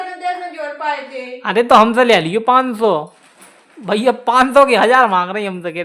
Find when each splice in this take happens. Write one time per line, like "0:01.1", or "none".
none